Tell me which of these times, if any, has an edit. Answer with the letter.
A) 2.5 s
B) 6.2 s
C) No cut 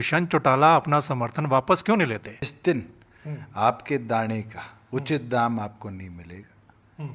A